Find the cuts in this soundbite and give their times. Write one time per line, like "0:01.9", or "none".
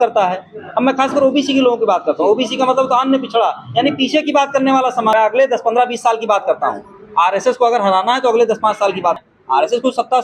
0:05.1
0:09.3